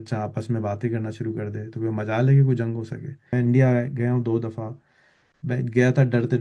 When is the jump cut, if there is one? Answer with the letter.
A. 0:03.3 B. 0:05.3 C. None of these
A